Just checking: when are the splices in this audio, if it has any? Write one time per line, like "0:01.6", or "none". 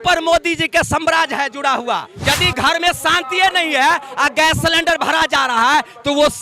0:02.1